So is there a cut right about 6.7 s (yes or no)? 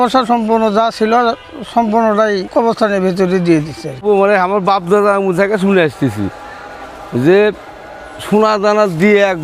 no